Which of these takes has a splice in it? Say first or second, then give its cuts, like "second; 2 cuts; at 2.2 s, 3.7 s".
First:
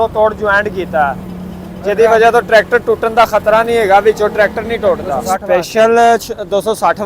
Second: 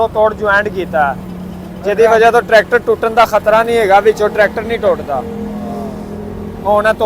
first; 1 cut; at 5.1 s